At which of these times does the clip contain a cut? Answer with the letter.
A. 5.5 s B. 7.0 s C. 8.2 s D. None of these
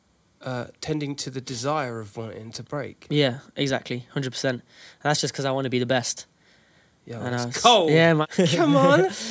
C